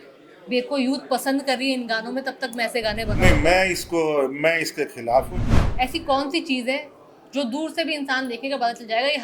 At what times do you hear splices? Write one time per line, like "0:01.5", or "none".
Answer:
0:05.4